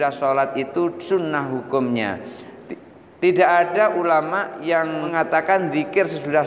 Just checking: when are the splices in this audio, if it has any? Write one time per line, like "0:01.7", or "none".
0:05.1